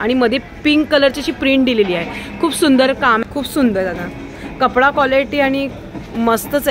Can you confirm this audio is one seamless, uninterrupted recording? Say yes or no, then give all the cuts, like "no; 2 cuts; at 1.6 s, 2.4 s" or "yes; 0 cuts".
no; 1 cut; at 3.2 s